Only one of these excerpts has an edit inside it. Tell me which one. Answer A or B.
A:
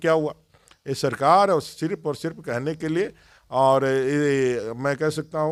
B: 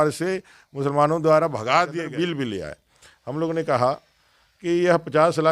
B